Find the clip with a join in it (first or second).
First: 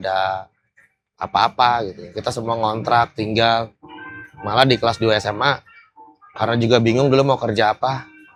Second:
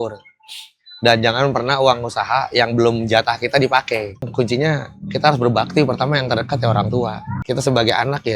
second